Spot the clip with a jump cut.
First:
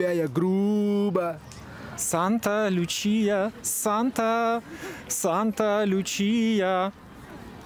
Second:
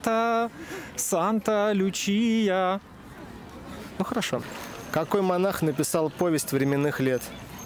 second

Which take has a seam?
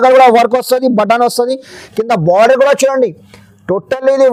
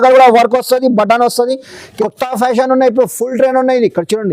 second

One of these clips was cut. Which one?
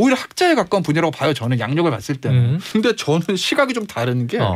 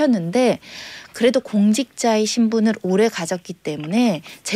first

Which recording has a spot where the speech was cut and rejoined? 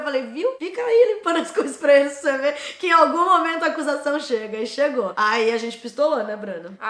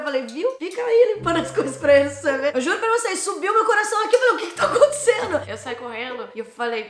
second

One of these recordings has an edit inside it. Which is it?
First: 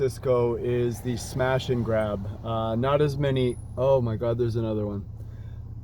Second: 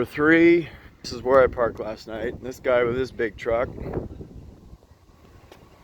second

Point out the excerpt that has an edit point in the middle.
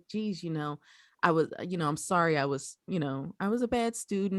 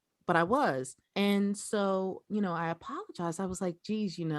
second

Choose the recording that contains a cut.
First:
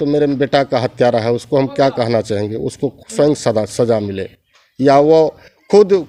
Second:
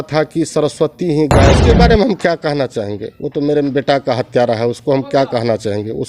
second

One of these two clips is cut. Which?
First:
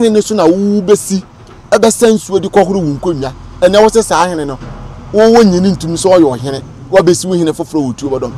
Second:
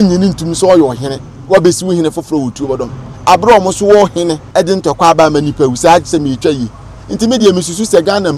second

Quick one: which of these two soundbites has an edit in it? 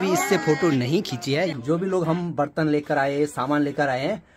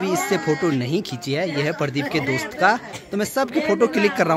first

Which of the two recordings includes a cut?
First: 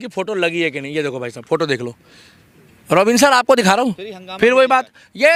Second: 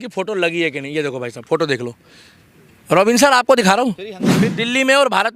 second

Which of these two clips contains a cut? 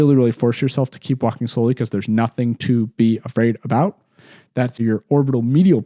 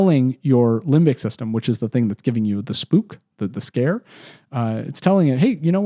first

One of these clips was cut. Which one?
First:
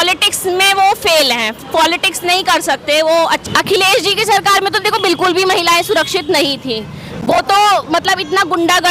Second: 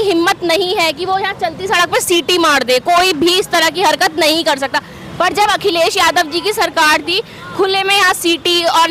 first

